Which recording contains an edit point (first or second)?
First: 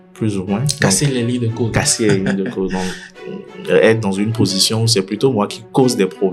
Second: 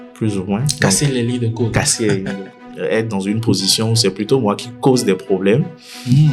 second